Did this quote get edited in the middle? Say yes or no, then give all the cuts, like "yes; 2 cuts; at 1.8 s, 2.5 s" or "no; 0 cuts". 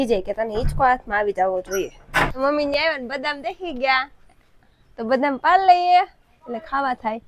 yes; 1 cut; at 2.4 s